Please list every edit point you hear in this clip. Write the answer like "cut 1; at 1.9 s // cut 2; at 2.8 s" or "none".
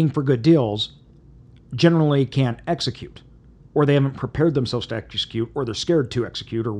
none